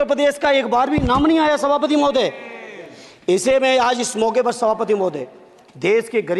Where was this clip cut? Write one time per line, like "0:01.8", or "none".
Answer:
none